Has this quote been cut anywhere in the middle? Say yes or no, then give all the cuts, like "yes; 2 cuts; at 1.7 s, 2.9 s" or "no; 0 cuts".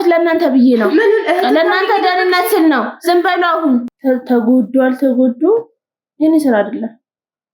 yes; 1 cut; at 3.9 s